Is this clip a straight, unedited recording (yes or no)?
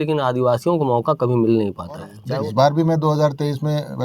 no